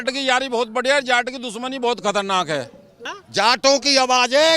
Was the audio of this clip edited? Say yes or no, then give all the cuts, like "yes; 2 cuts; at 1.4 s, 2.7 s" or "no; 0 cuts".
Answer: yes; 1 cut; at 3.0 s